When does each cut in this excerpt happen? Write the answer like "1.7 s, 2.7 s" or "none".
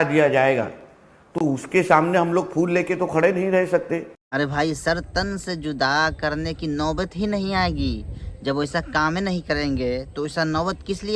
none

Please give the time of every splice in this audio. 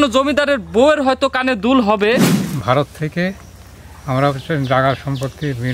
2.4 s

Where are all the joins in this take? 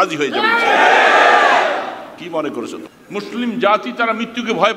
2.9 s

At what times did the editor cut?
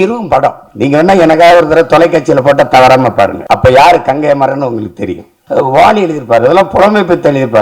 3.4 s, 5.4 s

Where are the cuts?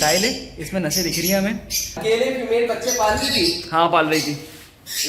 2.0 s

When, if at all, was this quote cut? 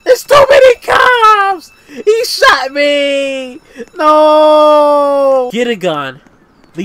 5.5 s

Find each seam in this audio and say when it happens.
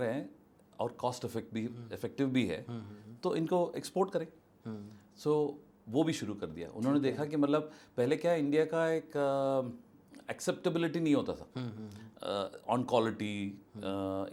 none

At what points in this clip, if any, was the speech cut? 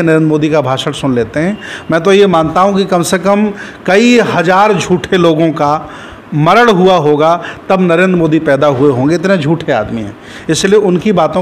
none

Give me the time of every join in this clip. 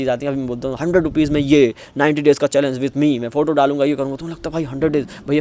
none

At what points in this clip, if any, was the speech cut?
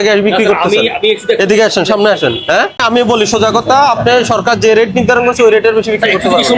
2.8 s

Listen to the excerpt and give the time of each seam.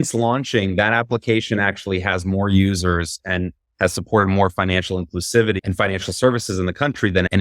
5.6 s

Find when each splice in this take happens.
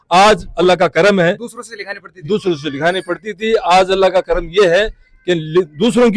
none

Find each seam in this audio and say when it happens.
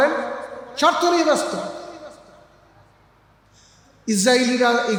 none

